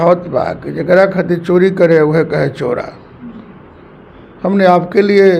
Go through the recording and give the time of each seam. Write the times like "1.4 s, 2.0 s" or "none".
none